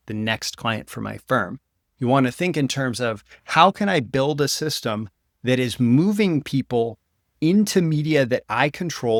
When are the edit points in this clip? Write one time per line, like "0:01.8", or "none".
none

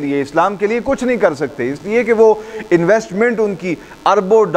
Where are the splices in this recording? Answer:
none

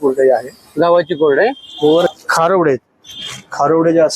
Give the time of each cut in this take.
0:02.1

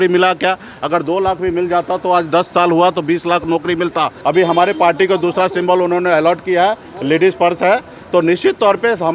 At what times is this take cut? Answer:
0:04.1

